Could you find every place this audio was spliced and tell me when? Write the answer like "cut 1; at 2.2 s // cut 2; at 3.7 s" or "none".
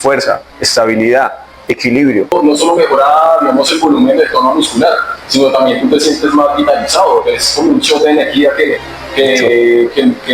cut 1; at 2.3 s